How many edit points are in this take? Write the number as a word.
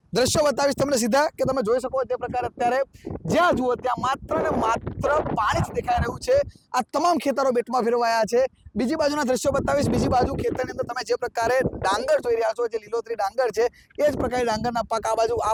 zero